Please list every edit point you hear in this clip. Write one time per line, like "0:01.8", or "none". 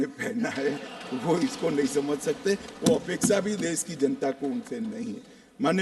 none